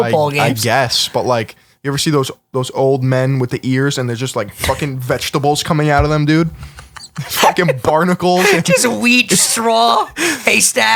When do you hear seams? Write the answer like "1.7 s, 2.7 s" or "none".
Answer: none